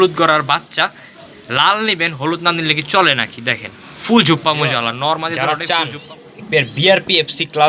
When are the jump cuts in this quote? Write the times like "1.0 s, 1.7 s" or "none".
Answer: 5.4 s